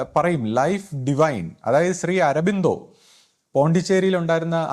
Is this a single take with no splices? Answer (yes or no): yes